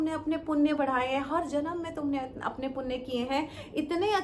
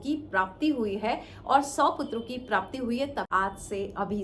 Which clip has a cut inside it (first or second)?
second